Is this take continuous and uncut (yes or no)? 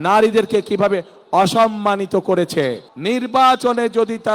no